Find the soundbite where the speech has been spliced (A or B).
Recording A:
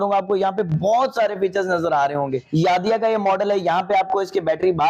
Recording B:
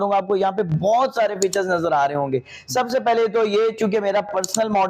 A